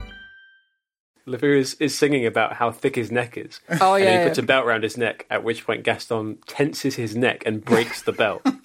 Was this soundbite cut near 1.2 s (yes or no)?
yes